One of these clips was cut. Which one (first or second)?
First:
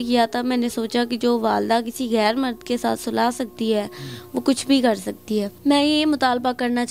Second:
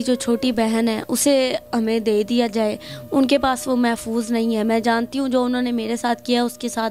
first